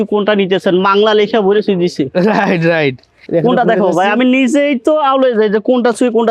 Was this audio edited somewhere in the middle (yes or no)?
no